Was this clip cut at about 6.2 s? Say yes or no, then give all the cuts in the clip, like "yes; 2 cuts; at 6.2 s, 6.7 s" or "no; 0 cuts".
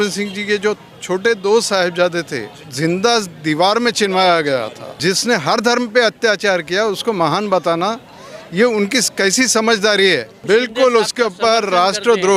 no; 3 cuts; at 2.7 s, 4.8 s, 10.3 s